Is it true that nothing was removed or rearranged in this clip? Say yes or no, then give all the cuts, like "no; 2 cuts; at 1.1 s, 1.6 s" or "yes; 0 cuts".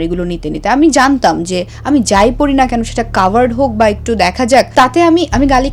no; 1 cut; at 4.7 s